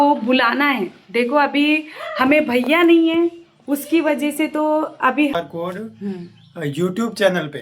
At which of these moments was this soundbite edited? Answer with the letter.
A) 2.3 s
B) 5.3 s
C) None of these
B